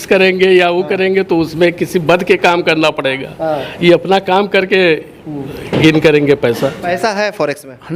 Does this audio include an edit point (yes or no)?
yes